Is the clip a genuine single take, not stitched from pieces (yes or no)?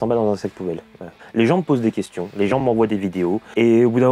no